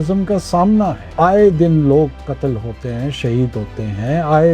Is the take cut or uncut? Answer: cut